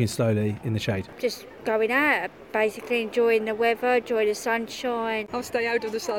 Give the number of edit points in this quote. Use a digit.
2